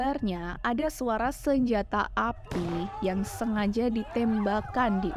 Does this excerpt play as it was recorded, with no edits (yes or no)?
yes